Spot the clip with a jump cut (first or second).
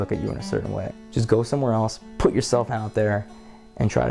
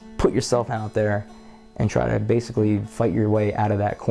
first